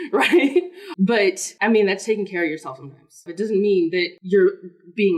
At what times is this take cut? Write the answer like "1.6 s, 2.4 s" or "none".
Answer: 1.0 s, 3.2 s, 4.2 s